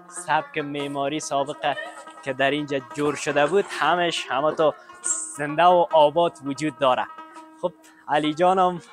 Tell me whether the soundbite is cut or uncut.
uncut